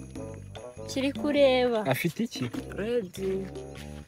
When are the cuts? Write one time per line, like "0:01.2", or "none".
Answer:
0:00.9